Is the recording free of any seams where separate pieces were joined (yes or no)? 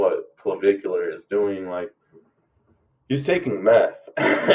yes